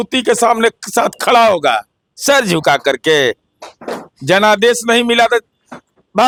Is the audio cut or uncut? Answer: uncut